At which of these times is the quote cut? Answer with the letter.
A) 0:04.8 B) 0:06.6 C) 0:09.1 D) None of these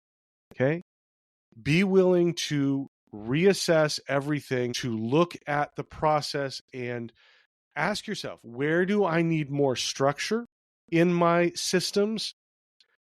A